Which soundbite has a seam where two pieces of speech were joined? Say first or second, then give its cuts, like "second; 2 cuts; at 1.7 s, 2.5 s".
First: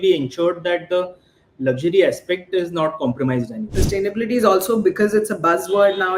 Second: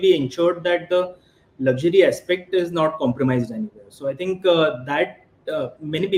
first; 1 cut; at 3.8 s